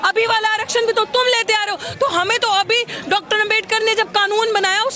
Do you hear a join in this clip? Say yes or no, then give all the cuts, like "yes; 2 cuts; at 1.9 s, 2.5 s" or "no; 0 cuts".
no; 0 cuts